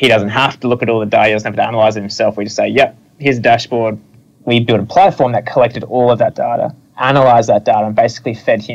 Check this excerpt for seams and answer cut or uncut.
cut